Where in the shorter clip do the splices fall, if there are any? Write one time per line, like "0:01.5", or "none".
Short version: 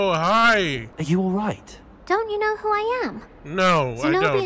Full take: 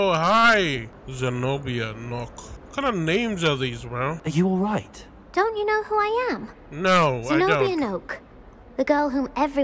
0:01.0